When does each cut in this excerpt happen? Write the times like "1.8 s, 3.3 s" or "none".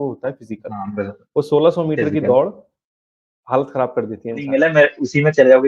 4.5 s

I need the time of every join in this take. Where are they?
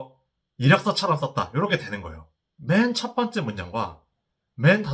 2.5 s

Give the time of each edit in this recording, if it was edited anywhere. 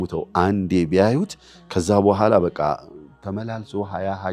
none

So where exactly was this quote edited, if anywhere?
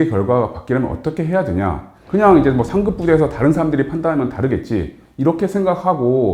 1.9 s

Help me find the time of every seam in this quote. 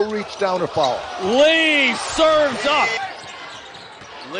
3.1 s

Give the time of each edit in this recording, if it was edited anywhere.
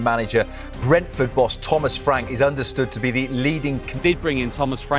3.9 s

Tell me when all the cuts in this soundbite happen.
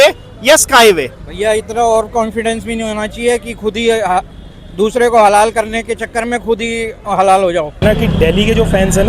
7.8 s

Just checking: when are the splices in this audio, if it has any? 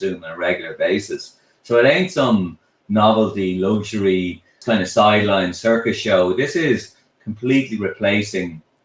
4.6 s

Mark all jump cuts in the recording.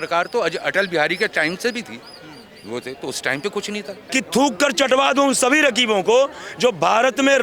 4.0 s

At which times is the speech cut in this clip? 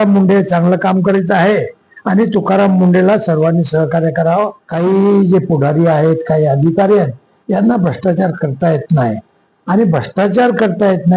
4.6 s

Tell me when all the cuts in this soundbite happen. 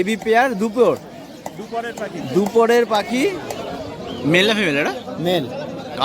3.5 s

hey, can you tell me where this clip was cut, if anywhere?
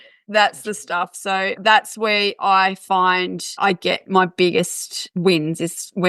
1.6 s, 3.6 s

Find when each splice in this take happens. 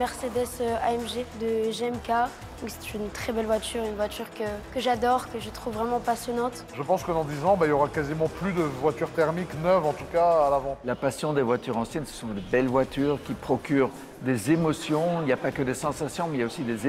1.3 s, 4.6 s, 6.7 s, 10.8 s

